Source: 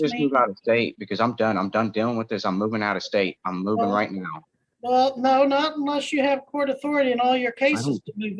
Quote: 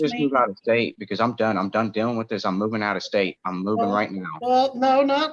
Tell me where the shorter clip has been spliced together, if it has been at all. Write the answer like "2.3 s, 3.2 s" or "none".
4.3 s